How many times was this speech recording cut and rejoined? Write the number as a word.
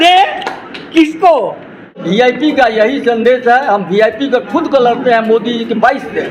one